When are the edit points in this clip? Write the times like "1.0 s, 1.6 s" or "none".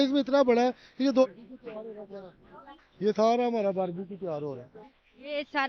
1.2 s